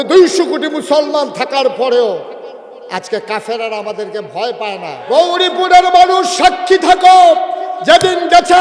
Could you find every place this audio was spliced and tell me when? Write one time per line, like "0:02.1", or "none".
0:04.9